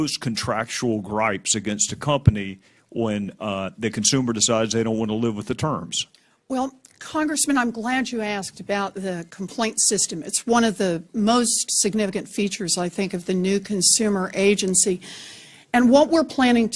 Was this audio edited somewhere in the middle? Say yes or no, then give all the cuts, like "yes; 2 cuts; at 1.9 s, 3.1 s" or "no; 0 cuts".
yes; 1 cut; at 13.3 s